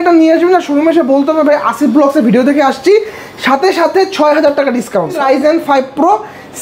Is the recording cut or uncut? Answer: cut